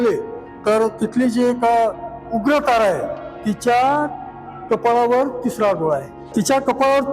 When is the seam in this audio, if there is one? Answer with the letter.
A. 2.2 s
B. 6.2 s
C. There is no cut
B